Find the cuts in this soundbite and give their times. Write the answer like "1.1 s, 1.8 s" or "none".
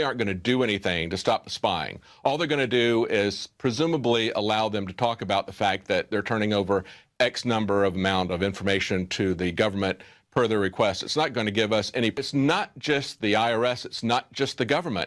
none